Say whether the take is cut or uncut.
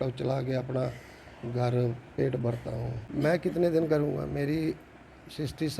cut